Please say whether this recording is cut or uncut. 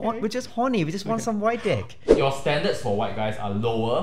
cut